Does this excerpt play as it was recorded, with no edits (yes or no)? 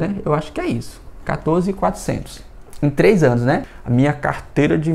no